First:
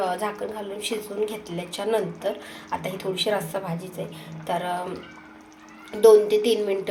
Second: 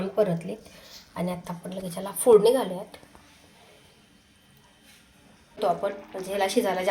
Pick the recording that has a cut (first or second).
second